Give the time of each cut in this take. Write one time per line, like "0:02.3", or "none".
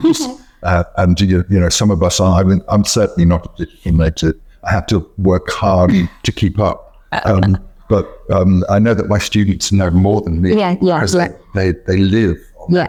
none